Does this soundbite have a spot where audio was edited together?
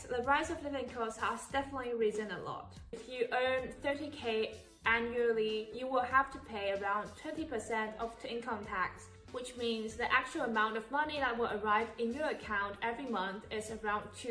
yes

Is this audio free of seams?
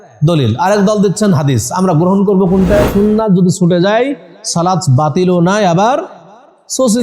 no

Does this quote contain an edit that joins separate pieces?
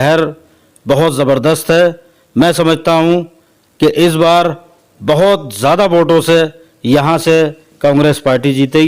no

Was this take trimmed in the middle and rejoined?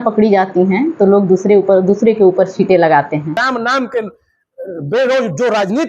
yes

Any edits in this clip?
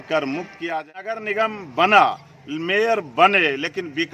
yes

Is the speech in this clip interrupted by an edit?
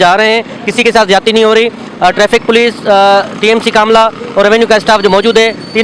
no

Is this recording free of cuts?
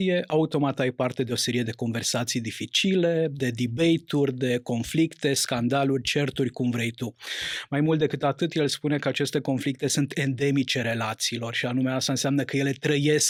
yes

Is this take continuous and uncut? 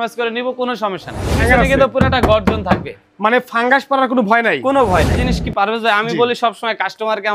no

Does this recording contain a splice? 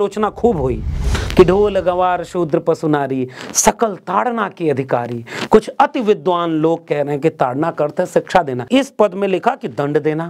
yes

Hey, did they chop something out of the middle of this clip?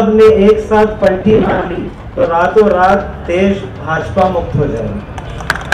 no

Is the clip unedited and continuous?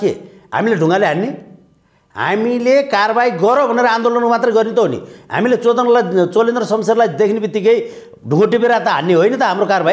yes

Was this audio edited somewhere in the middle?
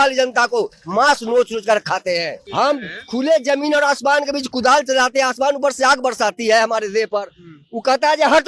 yes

